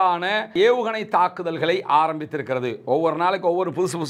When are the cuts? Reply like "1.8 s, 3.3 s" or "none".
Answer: none